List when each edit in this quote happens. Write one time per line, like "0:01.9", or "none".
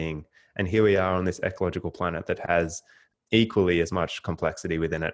0:03.0